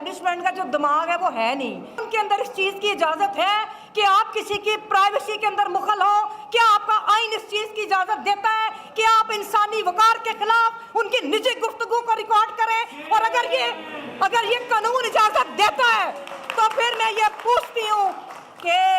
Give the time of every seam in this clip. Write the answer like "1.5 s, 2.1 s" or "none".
2.0 s